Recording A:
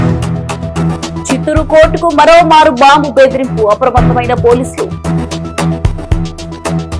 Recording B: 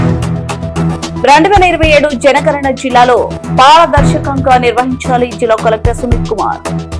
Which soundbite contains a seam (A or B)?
B